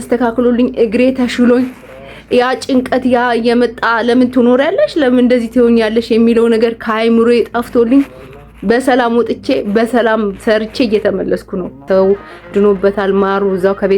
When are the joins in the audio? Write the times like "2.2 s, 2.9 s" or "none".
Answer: 11.8 s